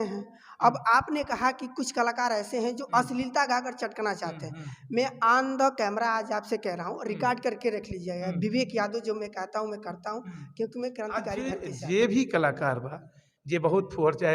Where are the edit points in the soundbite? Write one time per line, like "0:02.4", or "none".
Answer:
0:11.4